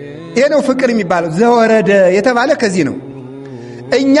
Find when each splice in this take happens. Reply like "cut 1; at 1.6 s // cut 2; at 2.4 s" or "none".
none